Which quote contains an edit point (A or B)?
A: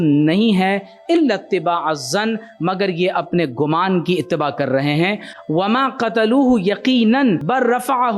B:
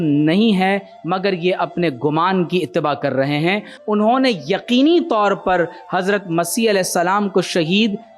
B